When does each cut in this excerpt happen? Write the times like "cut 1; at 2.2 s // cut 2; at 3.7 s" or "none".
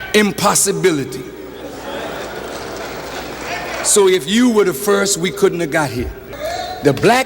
cut 1; at 6.2 s